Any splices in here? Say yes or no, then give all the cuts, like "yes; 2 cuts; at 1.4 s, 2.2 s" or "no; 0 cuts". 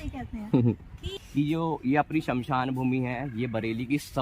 yes; 1 cut; at 1.0 s